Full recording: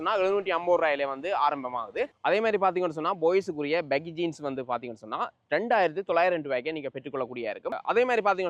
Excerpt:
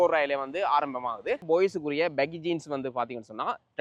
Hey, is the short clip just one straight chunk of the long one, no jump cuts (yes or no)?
no